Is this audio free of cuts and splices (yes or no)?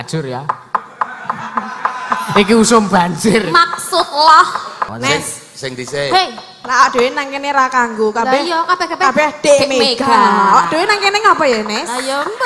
no